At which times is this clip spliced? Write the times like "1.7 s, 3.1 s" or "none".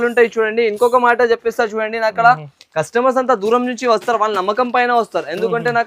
none